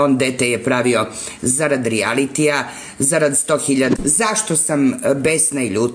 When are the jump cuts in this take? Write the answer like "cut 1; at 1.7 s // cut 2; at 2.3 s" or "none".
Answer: cut 1; at 3.9 s